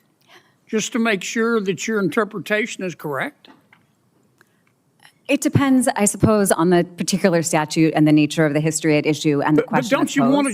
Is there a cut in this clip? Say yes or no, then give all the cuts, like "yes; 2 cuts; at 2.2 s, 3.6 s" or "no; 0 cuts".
yes; 1 cut; at 4.4 s